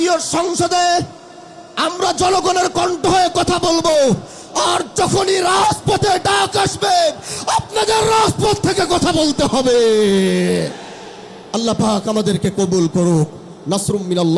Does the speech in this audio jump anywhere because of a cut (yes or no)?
no